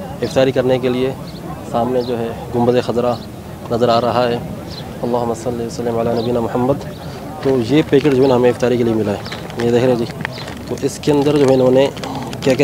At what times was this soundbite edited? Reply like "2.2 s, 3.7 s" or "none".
none